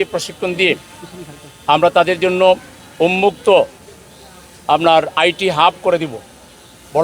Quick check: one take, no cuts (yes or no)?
yes